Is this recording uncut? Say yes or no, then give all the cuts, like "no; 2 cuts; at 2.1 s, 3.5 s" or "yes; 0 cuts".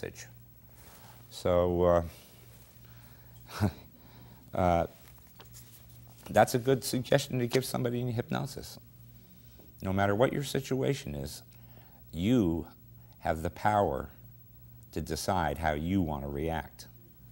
no; 1 cut; at 16.1 s